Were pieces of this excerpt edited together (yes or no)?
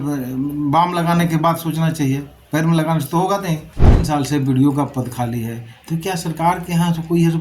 yes